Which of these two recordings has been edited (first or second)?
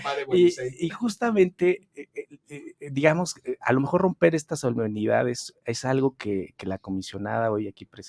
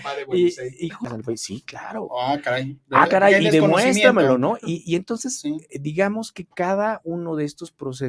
second